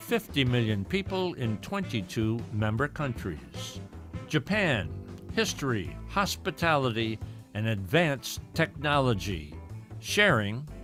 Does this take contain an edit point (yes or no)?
no